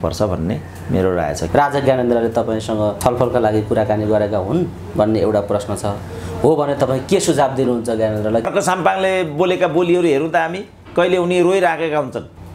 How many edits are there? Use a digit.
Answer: 3